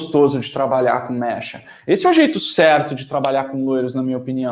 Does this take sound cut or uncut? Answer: uncut